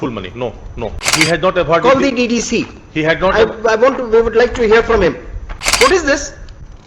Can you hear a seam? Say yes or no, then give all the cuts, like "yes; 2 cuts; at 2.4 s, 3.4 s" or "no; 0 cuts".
yes; 1 cut; at 1.0 s